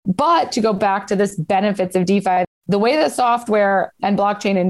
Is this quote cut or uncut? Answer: cut